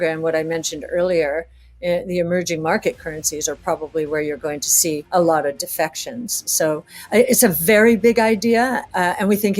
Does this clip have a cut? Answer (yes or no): yes